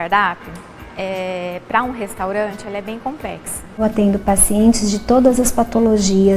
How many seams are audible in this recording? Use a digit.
1